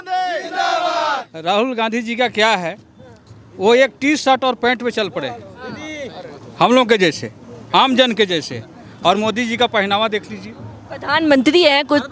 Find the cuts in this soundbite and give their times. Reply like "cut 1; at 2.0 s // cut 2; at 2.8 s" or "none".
cut 1; at 1.2 s